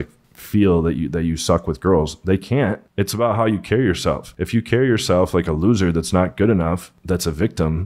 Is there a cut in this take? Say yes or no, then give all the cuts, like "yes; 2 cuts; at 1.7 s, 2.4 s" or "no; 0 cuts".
no; 0 cuts